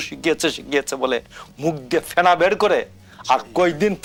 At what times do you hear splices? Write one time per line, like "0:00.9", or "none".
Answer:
none